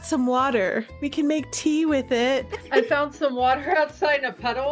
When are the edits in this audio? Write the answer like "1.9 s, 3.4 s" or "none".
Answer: 0.9 s, 2.6 s